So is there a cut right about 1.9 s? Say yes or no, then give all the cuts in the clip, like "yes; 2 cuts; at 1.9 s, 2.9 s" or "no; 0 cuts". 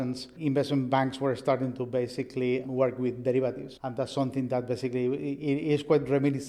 no; 0 cuts